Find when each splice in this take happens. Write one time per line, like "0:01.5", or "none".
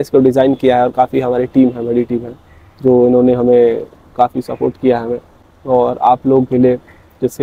none